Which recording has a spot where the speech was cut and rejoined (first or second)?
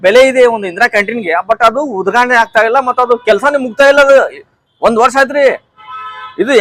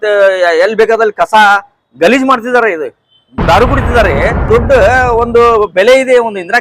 second